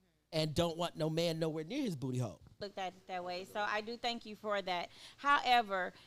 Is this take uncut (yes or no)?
no